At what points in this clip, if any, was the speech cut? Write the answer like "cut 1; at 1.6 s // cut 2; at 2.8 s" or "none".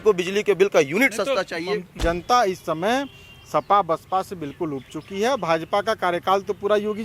cut 1; at 1.9 s